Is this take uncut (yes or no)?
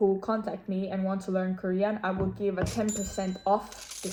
yes